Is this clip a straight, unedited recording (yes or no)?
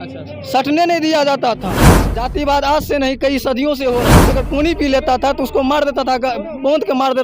no